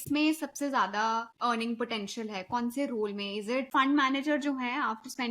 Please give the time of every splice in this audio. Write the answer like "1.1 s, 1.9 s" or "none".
1.3 s, 3.7 s